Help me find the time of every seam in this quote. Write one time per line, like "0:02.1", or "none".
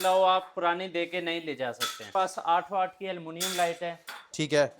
0:02.1